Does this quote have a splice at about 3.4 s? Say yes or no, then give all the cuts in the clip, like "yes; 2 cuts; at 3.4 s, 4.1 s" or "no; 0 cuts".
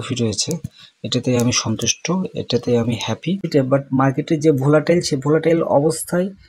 yes; 1 cut; at 3.4 s